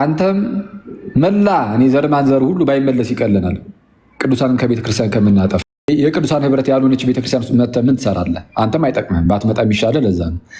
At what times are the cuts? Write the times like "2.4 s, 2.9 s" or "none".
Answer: 5.7 s